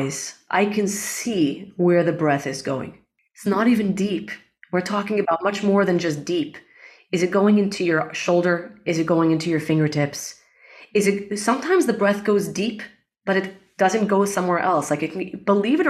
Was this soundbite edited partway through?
yes; 1 cut; at 3.2 s

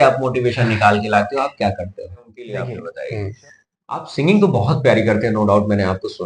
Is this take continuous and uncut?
no; 1 cut; at 2.4 s

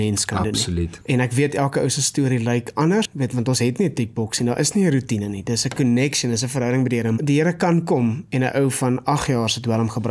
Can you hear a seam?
yes; 3 cuts; at 1.0 s, 3.1 s, 7.2 s

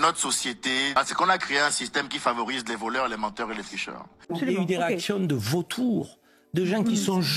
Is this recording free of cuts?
no; 2 cuts; at 1.0 s, 4.2 s

